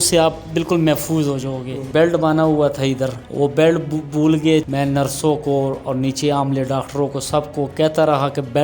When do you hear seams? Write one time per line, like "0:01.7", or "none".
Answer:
0:01.8
0:03.2
0:04.7